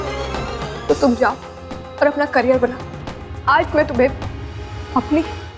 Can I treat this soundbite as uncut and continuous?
yes; 0 cuts

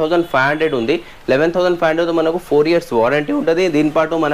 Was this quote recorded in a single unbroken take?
yes; 0 cuts

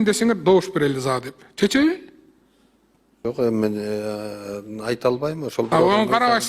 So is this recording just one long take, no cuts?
yes; 0 cuts

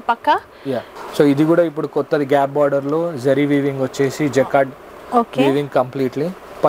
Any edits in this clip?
yes; 1 cut; at 0.9 s

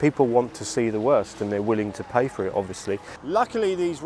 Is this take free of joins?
no; 1 cut; at 3.1 s

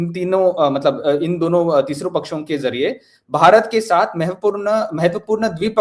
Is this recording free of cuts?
yes; 0 cuts

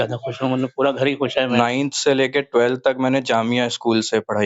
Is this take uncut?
no; 1 cut; at 1.5 s

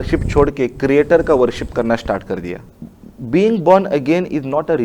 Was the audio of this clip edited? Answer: yes; 1 cut; at 2.7 s

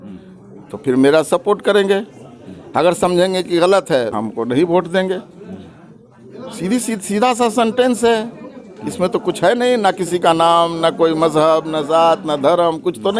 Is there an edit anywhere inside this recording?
yes; 1 cut; at 4.1 s

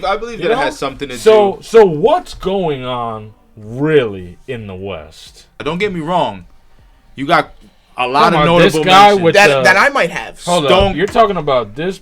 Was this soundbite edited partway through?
yes; 2 cuts; at 5.6 s, 11.0 s

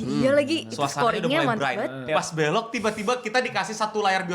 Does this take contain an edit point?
yes; 1 cut; at 2.1 s

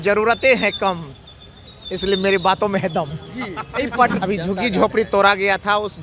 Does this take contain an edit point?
yes; 1 cut; at 4.1 s

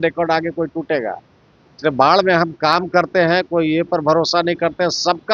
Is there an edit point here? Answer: no; 0 cuts

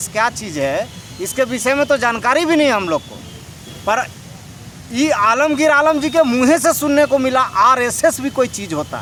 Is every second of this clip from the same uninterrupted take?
yes; 0 cuts

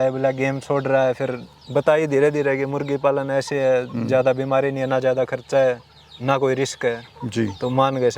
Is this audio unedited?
yes; 0 cuts

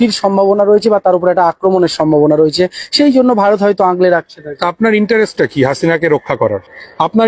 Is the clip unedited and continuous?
yes; 0 cuts

